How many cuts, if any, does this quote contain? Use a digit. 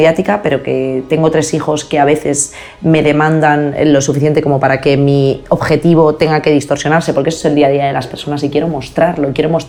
0